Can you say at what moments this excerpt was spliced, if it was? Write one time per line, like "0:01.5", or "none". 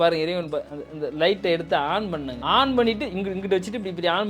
0:02.3